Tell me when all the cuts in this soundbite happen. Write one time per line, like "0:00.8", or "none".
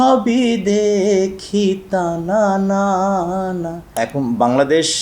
0:04.0